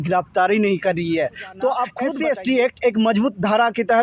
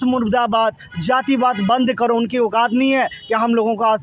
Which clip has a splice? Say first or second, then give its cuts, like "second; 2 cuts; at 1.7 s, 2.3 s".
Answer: first; 1 cut; at 2.0 s